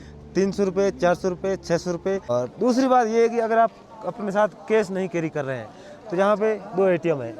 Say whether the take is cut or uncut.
cut